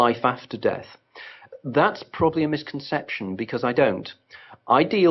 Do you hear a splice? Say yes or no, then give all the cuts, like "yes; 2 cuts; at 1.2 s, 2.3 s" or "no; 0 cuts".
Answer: yes; 1 cut; at 2.0 s